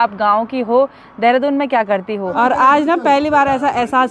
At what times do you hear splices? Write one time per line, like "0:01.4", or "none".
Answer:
0:02.3